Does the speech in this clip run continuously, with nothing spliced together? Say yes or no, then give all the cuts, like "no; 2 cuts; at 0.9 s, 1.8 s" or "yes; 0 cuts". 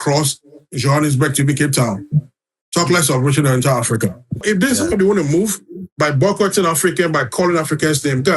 no; 1 cut; at 4.4 s